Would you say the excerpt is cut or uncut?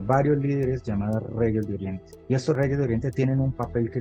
cut